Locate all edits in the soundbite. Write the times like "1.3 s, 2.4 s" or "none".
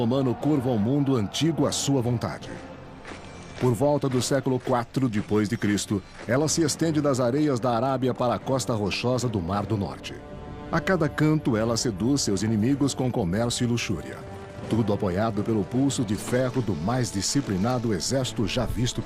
15.0 s